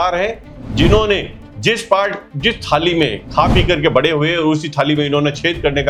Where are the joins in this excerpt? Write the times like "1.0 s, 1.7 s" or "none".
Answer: none

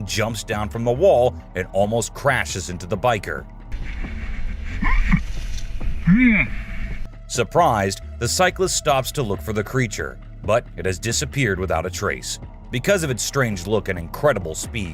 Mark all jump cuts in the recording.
none

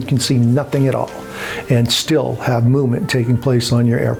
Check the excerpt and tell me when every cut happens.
none

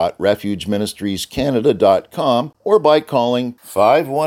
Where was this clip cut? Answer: 2.5 s

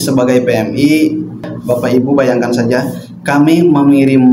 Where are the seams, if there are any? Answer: 1.5 s

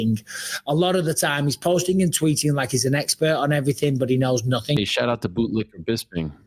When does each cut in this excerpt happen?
4.8 s

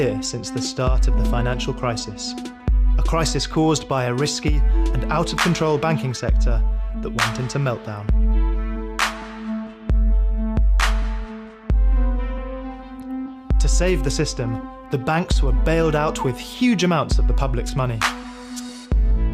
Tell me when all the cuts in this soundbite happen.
none

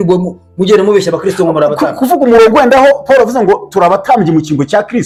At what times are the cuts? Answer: none

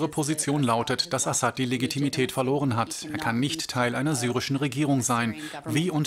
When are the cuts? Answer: 3.0 s

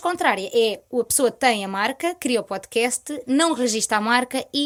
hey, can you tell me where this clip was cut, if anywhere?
none

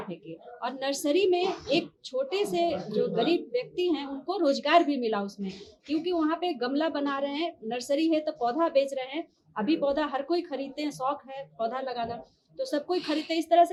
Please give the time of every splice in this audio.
none

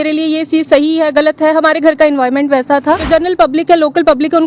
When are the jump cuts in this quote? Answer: 3.0 s

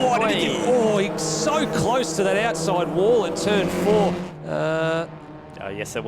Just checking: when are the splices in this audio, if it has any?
4.2 s

